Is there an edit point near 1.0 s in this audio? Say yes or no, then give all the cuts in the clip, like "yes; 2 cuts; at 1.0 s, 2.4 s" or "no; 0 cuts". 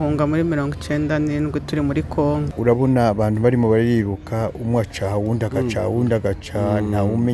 no; 1 cut; at 2.5 s